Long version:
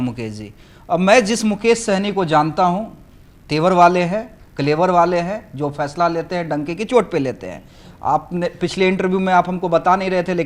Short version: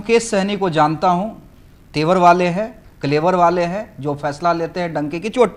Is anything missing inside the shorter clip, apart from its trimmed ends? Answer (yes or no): no